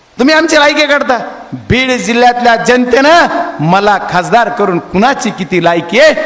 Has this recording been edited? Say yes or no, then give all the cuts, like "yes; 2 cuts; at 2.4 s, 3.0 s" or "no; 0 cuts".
no; 0 cuts